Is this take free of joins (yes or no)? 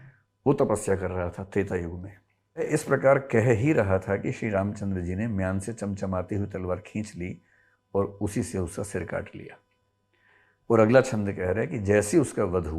no